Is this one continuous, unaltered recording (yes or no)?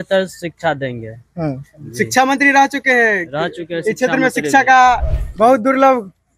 yes